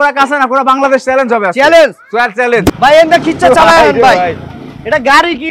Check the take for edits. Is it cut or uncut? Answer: cut